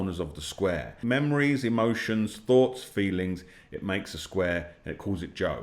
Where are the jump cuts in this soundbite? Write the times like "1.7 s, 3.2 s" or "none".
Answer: 1.0 s